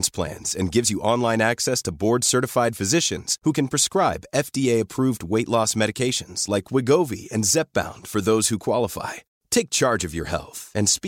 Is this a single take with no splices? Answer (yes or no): yes